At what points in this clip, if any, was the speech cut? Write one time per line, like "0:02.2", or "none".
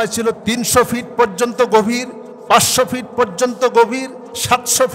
none